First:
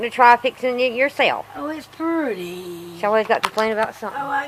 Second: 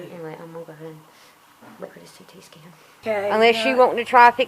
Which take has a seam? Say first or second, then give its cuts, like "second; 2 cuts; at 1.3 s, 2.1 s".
second; 1 cut; at 3.0 s